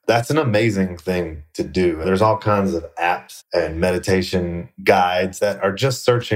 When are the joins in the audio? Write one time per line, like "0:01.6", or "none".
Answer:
0:02.1
0:03.3